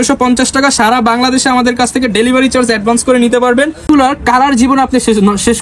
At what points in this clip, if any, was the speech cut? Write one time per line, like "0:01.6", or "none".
0:03.8